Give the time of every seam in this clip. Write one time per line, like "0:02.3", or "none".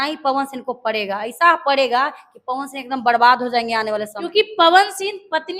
0:04.1